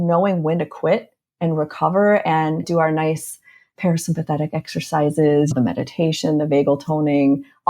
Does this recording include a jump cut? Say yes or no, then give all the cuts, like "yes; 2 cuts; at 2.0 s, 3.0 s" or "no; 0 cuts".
yes; 2 cuts; at 2.7 s, 5.5 s